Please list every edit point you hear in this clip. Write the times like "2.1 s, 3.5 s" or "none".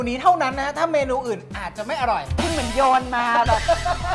2.3 s